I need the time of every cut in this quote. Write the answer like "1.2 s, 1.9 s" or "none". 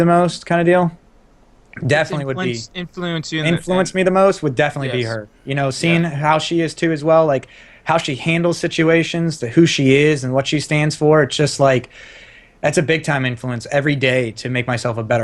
none